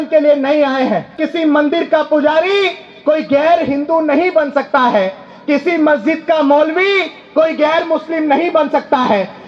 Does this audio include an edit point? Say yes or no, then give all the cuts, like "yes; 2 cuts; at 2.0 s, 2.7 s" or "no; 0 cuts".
yes; 1 cut; at 1.2 s